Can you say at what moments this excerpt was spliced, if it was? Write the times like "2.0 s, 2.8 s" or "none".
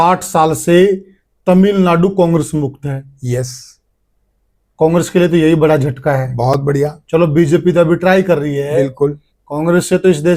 none